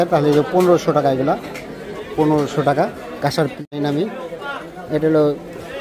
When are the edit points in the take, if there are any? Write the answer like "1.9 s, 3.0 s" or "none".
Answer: 3.6 s